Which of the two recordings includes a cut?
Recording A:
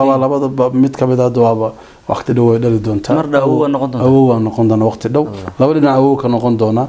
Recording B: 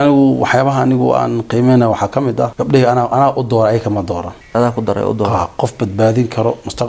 B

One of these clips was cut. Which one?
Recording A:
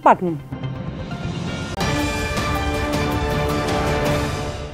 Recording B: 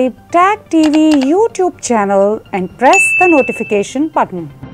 A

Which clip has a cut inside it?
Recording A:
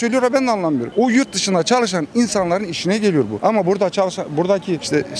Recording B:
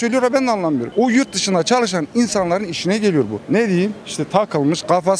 B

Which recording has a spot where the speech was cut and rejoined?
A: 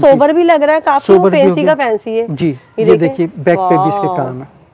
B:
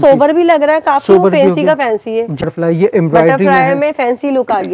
B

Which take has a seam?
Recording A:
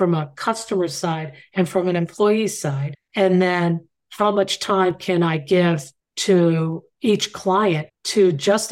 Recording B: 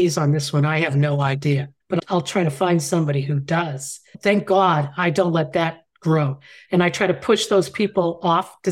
B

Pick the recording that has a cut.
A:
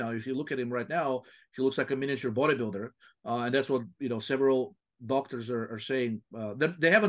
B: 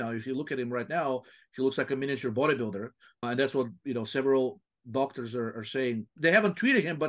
B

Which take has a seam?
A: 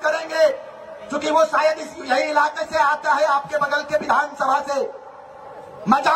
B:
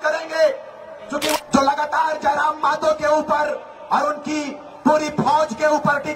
B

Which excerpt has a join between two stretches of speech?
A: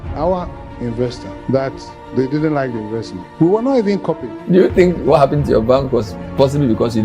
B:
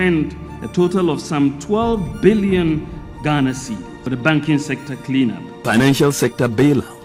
A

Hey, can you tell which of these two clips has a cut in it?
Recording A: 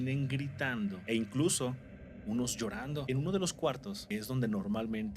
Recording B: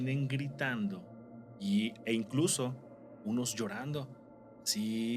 A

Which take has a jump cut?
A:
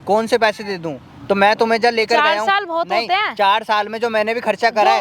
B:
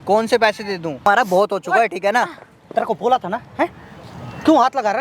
B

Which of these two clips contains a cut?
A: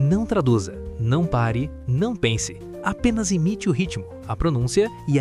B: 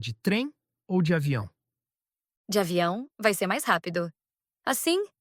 B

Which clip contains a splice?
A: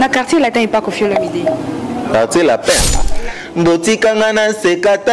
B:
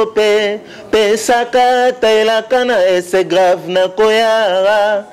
A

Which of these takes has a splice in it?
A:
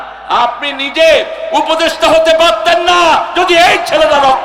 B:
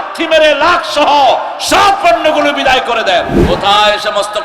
B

